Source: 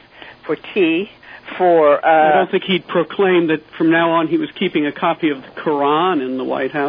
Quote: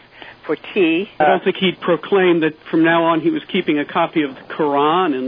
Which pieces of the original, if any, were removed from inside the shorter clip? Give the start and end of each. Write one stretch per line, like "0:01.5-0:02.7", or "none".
0:01.2-0:02.3